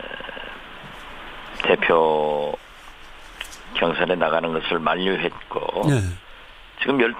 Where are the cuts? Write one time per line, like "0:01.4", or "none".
0:03.1